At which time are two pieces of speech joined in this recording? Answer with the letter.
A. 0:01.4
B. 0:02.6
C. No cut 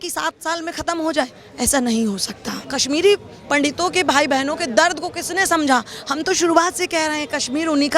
B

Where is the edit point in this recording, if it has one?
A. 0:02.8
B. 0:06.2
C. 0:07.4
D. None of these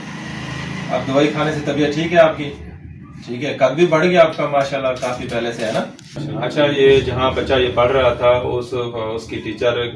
B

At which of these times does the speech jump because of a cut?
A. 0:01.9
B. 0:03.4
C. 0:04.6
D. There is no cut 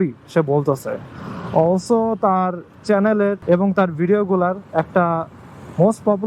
B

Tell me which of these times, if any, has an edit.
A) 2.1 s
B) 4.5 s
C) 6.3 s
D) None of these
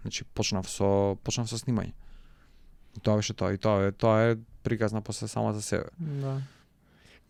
D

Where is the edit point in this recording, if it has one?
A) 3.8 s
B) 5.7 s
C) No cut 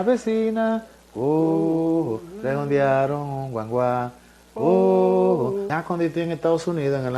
B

